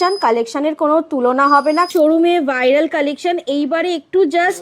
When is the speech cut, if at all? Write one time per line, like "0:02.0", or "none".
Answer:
0:01.9